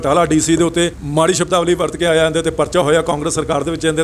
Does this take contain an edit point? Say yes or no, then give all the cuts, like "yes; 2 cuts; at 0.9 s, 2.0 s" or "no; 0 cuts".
yes; 1 cut; at 1.0 s